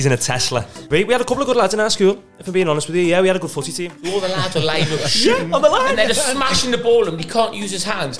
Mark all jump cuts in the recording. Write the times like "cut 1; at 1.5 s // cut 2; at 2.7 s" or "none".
cut 1; at 0.8 s // cut 2; at 3.9 s